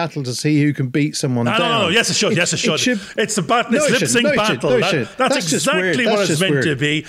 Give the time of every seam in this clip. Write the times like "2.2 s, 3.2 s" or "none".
none